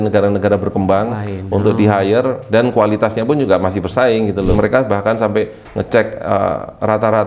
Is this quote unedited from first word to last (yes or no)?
no